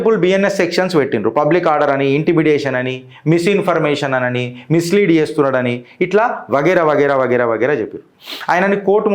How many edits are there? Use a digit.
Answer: 0